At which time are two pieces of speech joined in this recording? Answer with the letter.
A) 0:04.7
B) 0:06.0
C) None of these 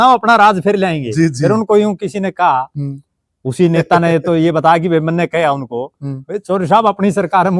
C